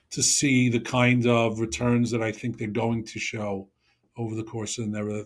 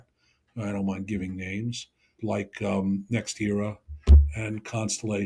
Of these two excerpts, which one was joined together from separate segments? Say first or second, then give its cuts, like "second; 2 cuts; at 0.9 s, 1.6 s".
second; 1 cut; at 2.1 s